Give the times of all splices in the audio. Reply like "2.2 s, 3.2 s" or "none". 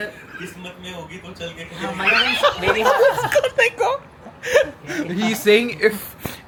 none